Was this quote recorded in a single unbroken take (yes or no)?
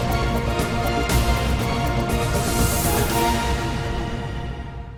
yes